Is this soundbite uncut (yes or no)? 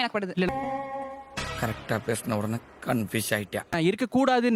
yes